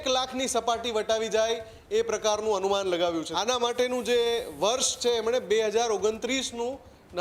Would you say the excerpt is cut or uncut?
cut